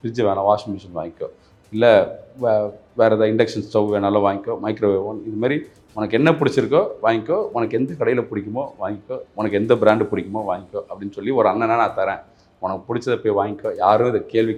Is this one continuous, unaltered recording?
yes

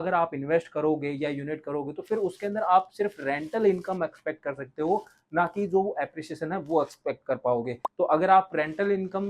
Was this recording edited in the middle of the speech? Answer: yes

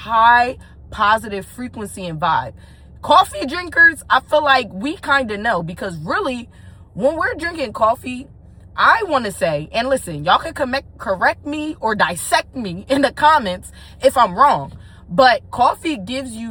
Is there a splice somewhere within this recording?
no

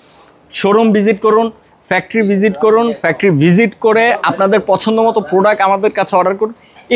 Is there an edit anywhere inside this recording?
no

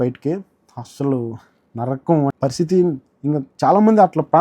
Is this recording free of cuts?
no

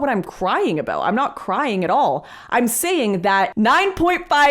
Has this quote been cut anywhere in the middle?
yes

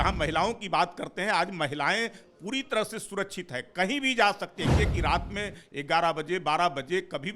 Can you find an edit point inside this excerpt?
yes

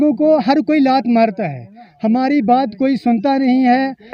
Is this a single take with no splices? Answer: yes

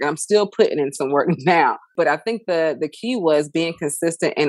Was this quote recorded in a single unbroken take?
no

